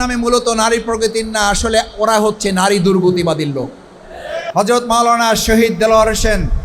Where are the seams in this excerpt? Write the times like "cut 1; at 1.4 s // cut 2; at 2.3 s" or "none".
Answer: cut 1; at 4.4 s